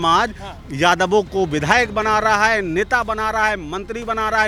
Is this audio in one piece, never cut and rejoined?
yes; 0 cuts

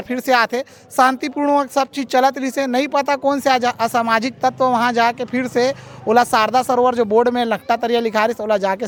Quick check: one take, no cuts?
yes; 0 cuts

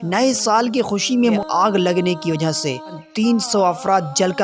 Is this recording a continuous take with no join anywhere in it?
no; 2 cuts; at 1.4 s, 3.0 s

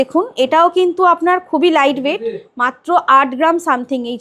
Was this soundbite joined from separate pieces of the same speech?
no; 0 cuts

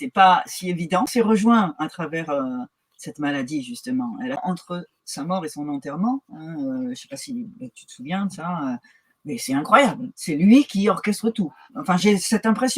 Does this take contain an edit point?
yes; 2 cuts; at 1.1 s, 4.4 s

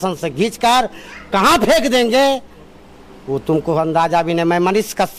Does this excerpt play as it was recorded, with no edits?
yes; 0 cuts

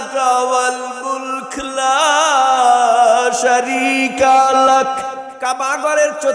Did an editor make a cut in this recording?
yes; 1 cut; at 5.2 s

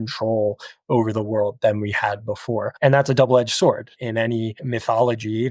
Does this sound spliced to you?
yes; 2 cuts; at 2.7 s, 4.2 s

